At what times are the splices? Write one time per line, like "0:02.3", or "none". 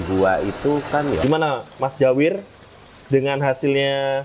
0:01.2

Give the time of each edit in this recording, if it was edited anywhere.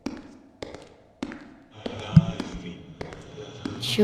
0:01.4

